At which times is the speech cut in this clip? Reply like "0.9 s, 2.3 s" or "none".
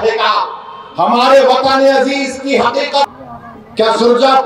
3.1 s